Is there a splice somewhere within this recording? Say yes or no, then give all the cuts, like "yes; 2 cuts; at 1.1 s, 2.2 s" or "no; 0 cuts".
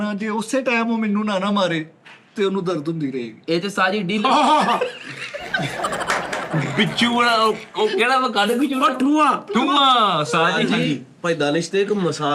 no; 0 cuts